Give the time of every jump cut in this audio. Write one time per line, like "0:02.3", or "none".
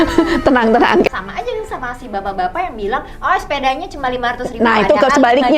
0:01.1

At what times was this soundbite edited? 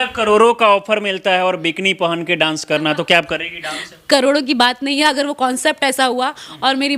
none

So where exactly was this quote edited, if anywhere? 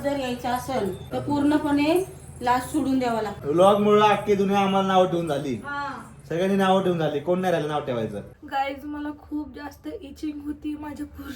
0:01.0
0:03.3
0:08.3

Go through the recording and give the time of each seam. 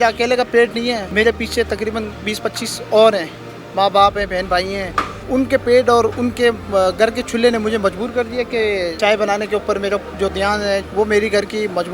0:05.2
0:10.8

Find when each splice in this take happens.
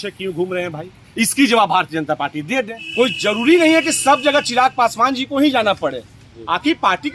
0:02.8

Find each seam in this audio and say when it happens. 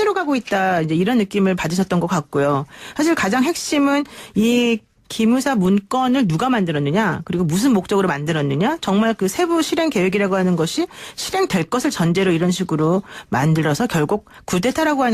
0:03.2

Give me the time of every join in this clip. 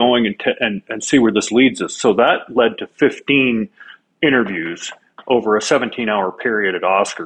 none

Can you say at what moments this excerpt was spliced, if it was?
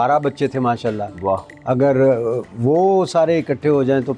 none

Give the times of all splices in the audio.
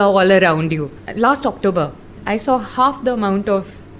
0:01.0
0:02.2

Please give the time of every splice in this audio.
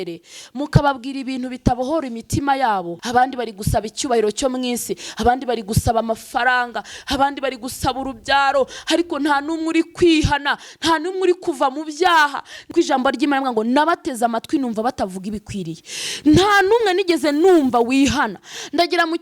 0:03.0
0:12.6

